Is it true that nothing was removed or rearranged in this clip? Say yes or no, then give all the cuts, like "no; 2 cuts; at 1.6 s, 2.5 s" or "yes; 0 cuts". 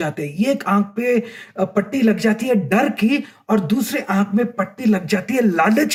yes; 0 cuts